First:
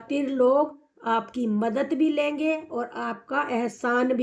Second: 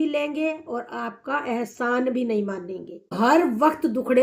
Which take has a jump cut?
second; 1 cut; at 3.2 s

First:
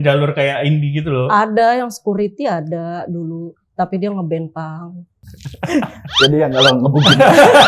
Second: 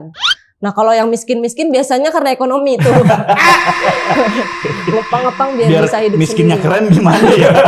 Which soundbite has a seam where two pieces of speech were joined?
first; 1 cut; at 5.2 s

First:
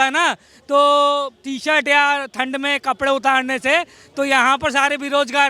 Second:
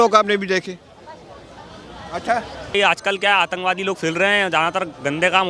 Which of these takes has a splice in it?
second; 1 cut; at 2.7 s

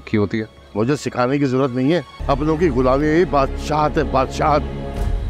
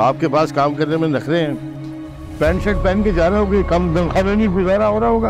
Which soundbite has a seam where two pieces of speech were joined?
first; 1 cut; at 2.1 s

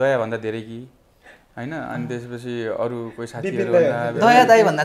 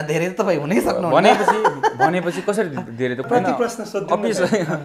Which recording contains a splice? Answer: second; 1 cut; at 3.3 s

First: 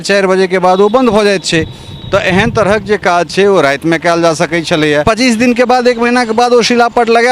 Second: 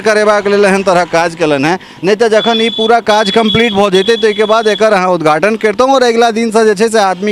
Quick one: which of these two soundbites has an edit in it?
first; 1 cut; at 5.0 s

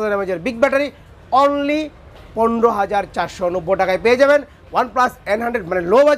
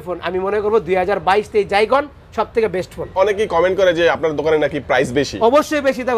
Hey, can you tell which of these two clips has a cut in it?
second; 1 cut; at 3.1 s

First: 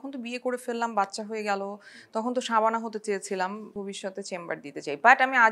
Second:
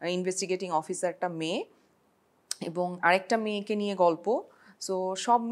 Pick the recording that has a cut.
first; 1 cut; at 3.6 s

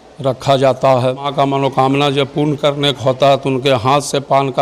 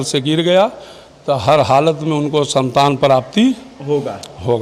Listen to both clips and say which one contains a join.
first; 1 cut; at 1.3 s

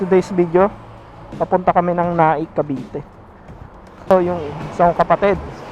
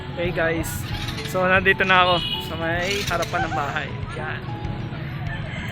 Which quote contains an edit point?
first; 1 cut; at 4.1 s

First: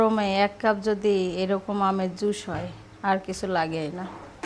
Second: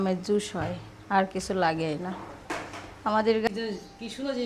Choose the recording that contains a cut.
second; 1 cut; at 3.5 s

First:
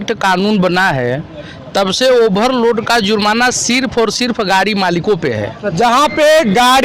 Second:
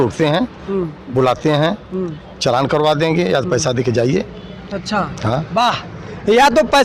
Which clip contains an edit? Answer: first; 1 cut; at 5.5 s

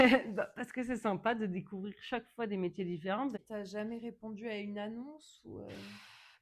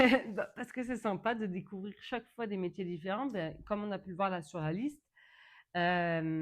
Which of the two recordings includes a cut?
first; 1 cut; at 3.3 s

